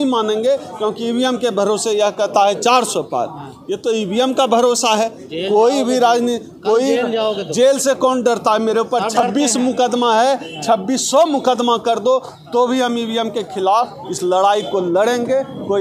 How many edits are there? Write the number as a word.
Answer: zero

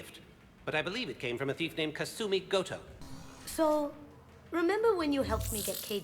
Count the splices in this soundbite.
one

